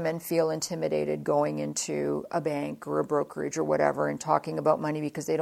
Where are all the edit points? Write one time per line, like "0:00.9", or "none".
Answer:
none